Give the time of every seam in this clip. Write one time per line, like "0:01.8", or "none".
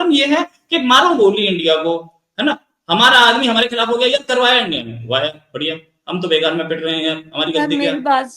none